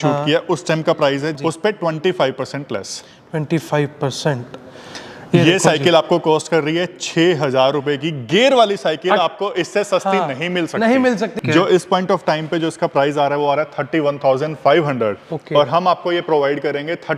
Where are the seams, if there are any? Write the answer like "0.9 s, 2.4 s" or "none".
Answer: 1.4 s, 11.3 s